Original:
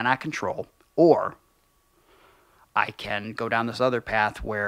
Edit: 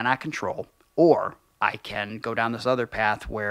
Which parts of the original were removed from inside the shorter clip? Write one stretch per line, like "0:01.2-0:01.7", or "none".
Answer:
0:01.4-0:02.6